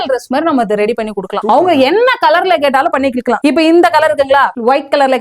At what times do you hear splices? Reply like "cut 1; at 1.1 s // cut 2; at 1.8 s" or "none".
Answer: none